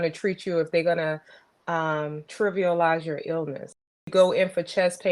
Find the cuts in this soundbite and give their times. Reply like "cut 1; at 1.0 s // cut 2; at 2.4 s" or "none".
cut 1; at 2.2 s // cut 2; at 4.1 s